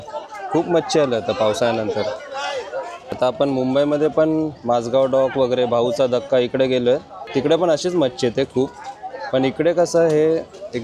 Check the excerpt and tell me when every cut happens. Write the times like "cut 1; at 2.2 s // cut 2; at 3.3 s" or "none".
cut 1; at 3.0 s // cut 2; at 7.3 s